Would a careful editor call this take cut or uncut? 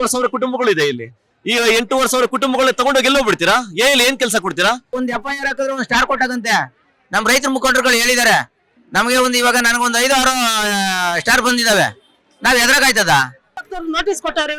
cut